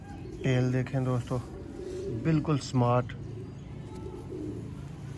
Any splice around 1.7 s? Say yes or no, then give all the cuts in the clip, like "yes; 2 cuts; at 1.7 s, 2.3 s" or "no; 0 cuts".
no; 0 cuts